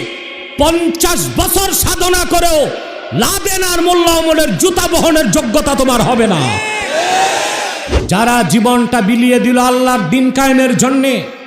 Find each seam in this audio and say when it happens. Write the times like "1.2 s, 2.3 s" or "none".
7.9 s